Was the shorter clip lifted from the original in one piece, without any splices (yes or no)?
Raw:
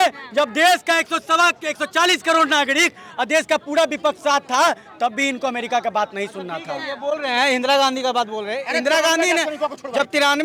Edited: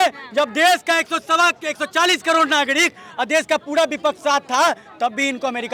yes